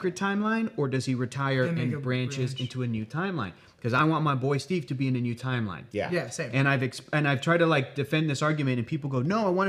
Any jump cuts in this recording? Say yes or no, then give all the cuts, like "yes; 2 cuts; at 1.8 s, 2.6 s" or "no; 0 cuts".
no; 0 cuts